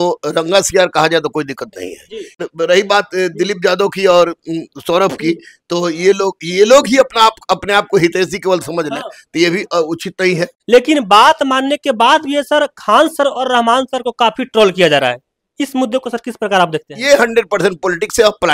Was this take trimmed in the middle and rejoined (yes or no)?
yes